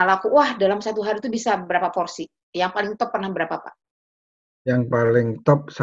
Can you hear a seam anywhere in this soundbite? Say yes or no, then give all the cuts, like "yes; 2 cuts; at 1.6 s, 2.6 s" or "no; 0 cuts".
no; 0 cuts